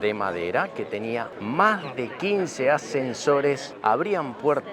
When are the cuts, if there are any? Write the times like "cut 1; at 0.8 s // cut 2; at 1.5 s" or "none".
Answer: cut 1; at 1.3 s // cut 2; at 3.7 s